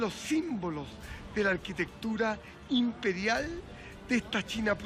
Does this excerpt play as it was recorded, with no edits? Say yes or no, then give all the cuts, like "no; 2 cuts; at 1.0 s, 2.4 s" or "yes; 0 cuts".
yes; 0 cuts